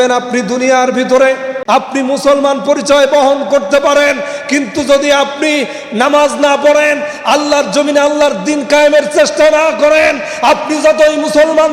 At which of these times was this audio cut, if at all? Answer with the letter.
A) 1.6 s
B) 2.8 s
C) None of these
A